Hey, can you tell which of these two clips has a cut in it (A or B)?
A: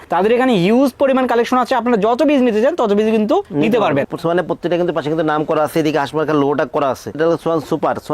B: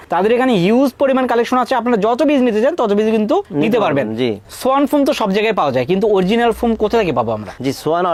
A